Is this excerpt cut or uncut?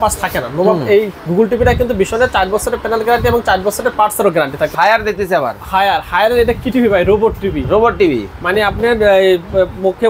cut